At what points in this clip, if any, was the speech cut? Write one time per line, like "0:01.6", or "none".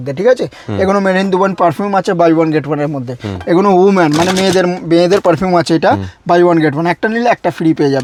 none